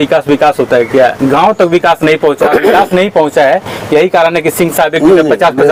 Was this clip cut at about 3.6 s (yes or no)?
no